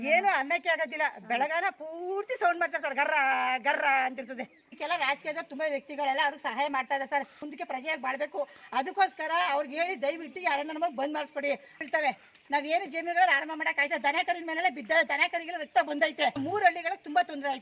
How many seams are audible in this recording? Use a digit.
4